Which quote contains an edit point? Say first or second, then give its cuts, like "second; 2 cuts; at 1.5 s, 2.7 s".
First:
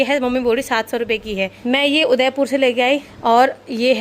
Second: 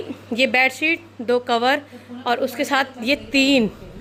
first; 2 cuts; at 1.5 s, 3.1 s